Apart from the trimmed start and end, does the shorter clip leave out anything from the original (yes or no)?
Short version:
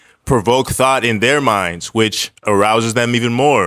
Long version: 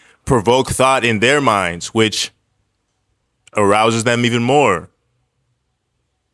yes